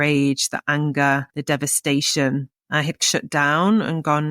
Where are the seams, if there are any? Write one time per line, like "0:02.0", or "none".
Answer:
0:01.3
0:03.0

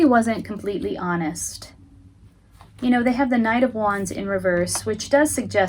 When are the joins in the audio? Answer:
none

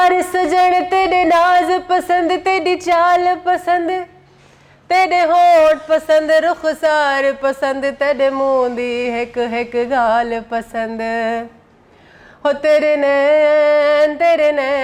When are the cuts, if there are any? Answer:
none

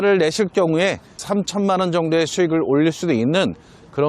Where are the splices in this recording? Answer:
0:01.2

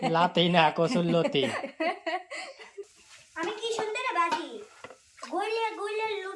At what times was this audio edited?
0:02.9

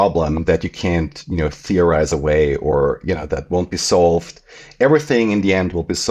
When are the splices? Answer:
none

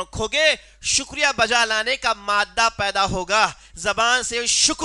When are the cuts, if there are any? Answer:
none

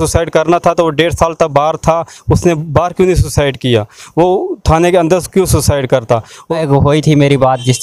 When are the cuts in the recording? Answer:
0:06.6

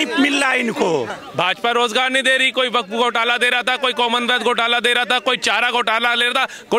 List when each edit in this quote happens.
0:01.1

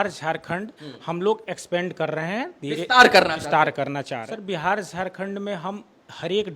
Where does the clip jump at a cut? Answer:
0:04.2

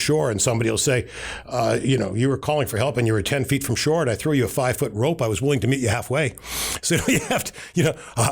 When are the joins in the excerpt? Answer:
none

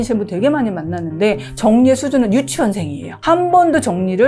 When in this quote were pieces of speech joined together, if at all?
none

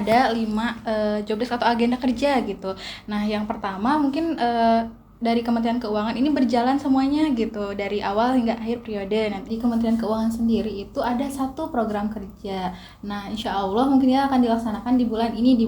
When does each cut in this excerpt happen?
0:09.5

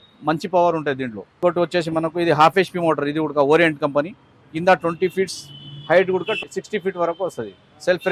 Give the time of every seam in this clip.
none

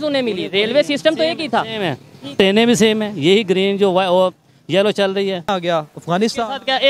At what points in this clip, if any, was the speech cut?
0:05.5

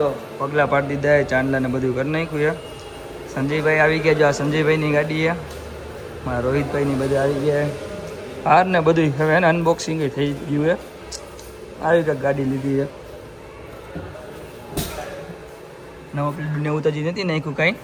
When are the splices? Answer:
none

